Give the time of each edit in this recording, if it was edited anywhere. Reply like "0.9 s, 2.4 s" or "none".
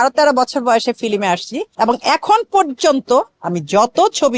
1.6 s